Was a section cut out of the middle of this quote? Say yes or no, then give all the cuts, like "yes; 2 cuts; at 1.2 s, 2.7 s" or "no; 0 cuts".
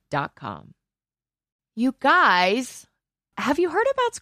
yes; 1 cut; at 1.5 s